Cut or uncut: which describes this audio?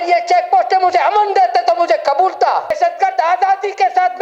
cut